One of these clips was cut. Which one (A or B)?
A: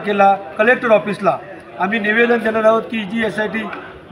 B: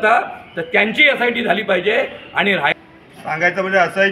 B